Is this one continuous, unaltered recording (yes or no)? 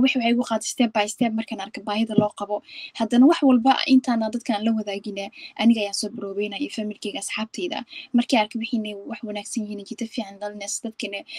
yes